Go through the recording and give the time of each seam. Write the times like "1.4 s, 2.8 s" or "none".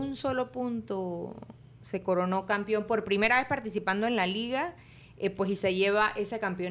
none